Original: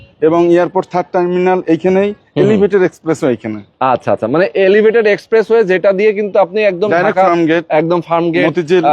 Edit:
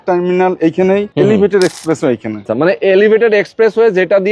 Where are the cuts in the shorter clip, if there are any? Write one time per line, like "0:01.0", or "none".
0:01.1
0:02.5